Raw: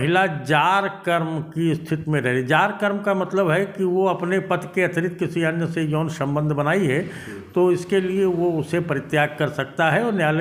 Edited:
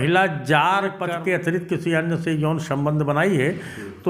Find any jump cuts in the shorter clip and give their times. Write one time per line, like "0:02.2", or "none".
0:01.2